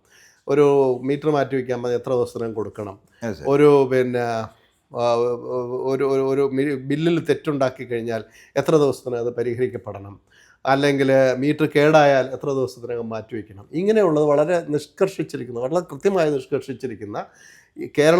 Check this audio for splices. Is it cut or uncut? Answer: uncut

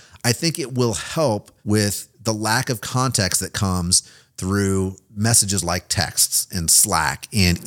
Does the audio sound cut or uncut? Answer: cut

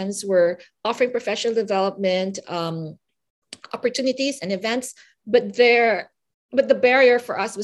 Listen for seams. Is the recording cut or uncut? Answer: uncut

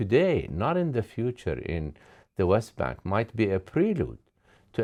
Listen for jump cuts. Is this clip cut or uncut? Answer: uncut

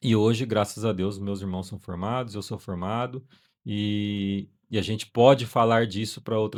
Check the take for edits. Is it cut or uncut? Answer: uncut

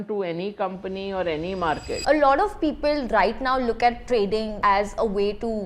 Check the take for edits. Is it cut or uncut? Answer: cut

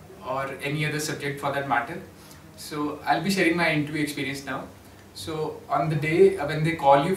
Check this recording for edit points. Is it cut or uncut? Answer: uncut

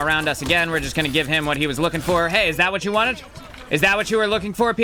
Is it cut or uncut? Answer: uncut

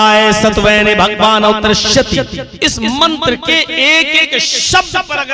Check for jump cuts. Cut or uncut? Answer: cut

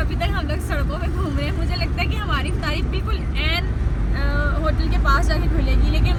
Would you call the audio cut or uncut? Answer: uncut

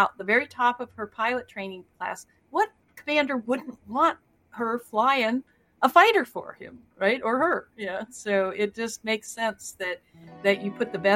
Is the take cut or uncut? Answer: uncut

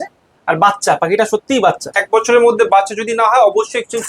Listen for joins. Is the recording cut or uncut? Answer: cut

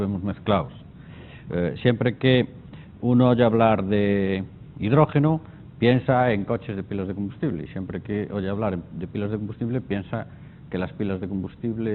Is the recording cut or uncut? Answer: uncut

